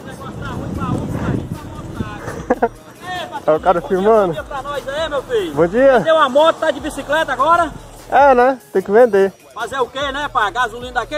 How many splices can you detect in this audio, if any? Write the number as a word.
zero